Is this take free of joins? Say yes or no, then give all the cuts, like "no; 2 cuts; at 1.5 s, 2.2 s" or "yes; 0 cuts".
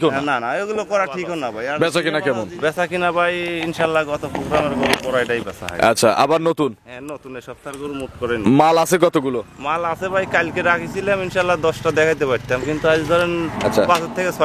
no; 1 cut; at 1.7 s